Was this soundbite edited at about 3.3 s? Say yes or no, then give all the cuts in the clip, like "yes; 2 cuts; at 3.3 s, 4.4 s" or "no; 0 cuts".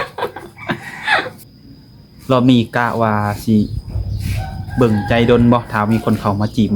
no; 1 cut; at 1.4 s